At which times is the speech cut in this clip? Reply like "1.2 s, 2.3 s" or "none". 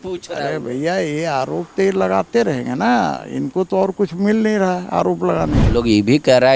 5.6 s